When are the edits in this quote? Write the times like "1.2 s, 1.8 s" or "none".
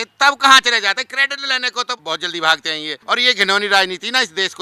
1.9 s, 3.0 s